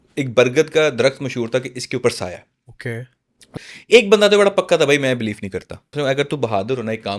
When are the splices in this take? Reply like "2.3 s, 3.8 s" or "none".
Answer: 3.6 s, 5.9 s